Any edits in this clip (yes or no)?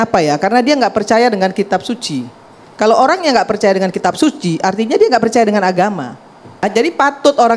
yes